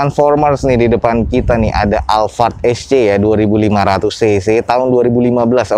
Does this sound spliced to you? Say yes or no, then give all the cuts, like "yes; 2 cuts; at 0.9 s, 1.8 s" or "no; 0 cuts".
no; 0 cuts